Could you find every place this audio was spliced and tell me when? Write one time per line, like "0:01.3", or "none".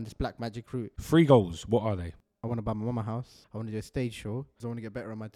0:01.0
0:03.3
0:04.6